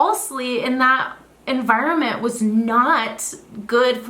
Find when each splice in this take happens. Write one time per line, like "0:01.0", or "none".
none